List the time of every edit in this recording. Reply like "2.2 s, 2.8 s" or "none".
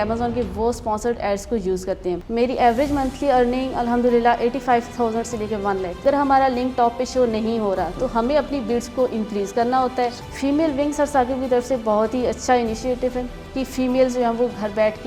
2.2 s, 6.0 s, 10.2 s

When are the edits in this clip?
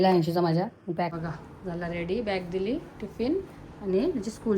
1.2 s

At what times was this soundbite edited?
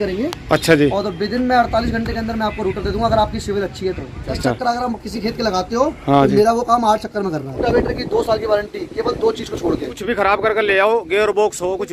4.4 s, 7.6 s, 9.9 s

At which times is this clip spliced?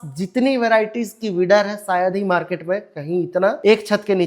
none

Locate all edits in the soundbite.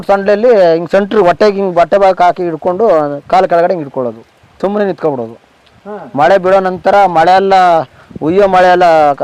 none

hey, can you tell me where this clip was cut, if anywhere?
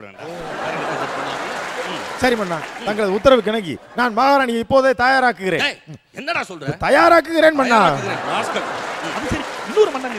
none

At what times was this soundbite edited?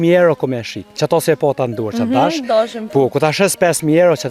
none

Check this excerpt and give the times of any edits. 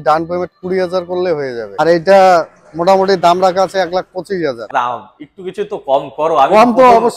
1.8 s, 4.7 s

